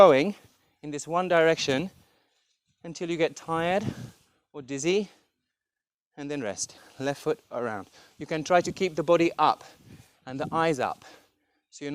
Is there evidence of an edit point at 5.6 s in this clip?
no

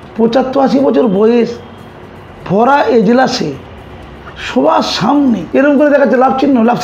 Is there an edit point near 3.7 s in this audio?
no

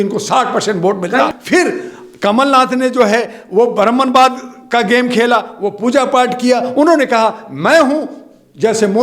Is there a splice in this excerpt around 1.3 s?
yes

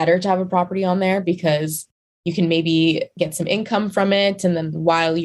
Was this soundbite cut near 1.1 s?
no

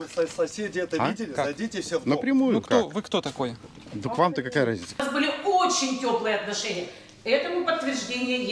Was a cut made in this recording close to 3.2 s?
no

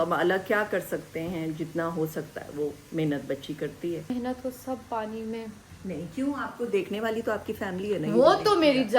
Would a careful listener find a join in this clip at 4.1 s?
yes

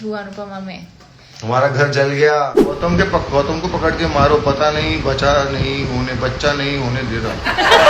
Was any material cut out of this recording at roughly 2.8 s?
yes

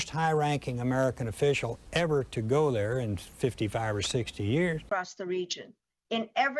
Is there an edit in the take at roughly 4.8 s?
yes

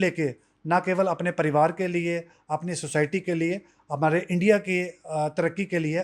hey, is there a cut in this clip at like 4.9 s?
no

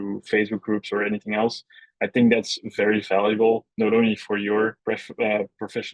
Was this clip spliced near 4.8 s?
yes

